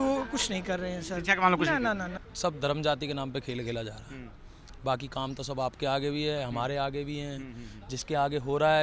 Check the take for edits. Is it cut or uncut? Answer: cut